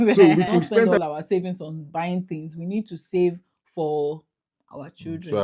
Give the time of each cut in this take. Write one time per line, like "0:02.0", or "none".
0:00.9

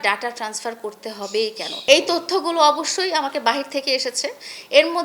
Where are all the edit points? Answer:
0:01.7

